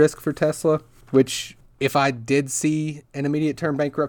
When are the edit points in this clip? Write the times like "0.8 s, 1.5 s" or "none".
none